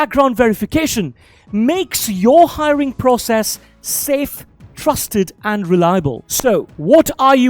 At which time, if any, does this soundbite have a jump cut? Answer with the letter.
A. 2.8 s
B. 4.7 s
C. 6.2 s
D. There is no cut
C